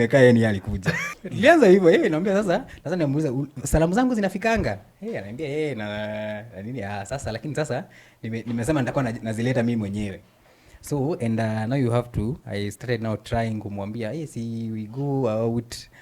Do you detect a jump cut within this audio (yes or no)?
yes